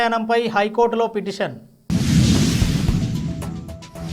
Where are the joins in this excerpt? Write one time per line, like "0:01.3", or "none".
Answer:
none